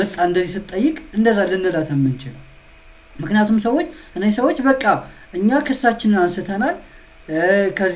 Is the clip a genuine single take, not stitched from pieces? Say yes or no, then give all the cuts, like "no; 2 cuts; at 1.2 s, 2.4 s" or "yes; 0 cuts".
yes; 0 cuts